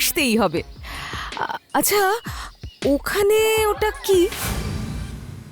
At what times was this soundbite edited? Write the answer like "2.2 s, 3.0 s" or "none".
4.4 s